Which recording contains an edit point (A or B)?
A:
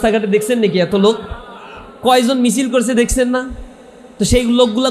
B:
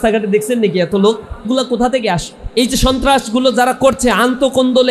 B